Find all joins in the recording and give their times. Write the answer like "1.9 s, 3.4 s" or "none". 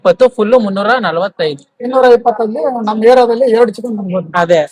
none